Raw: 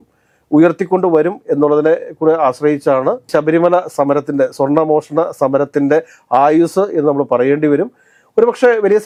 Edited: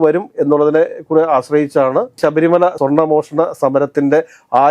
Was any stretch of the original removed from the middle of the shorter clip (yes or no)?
yes